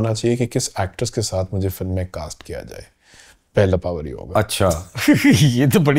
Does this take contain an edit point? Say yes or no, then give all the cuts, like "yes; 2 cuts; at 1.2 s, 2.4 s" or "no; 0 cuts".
no; 0 cuts